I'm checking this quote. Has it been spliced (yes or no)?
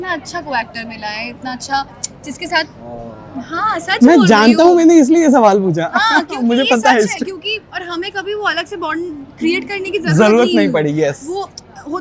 no